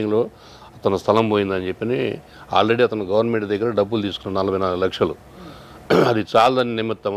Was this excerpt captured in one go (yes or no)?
yes